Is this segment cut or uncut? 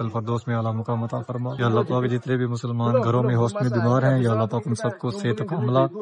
cut